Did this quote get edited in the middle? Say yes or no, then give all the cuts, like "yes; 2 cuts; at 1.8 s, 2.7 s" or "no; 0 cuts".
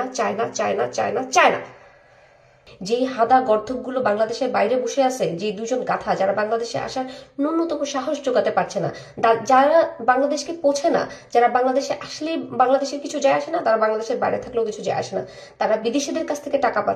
yes; 1 cut; at 2.7 s